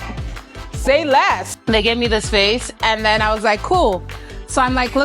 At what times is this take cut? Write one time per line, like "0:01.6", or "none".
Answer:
0:01.5